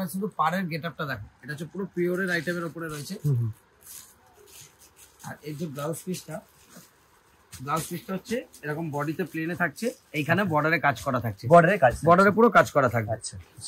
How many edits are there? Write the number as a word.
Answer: zero